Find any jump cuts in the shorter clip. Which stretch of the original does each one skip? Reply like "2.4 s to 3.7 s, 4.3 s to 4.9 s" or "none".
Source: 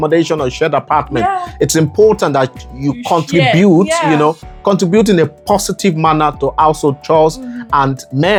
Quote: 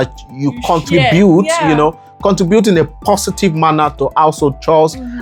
none